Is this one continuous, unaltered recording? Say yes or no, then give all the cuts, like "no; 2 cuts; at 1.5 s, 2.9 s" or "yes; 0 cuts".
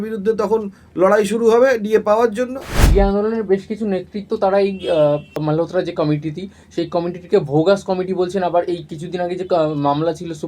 no; 2 cuts; at 2.8 s, 5.4 s